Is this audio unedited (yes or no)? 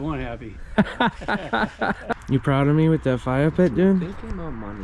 no